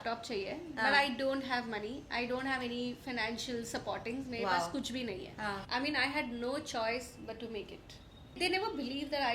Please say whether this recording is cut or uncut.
cut